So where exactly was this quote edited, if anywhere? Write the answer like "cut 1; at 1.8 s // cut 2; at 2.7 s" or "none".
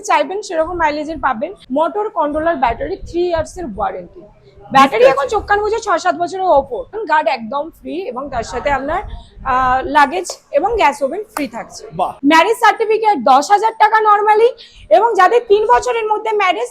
cut 1; at 1.6 s // cut 2; at 7.0 s // cut 3; at 12.1 s